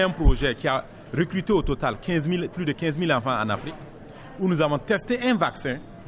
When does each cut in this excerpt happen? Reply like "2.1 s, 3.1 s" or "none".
none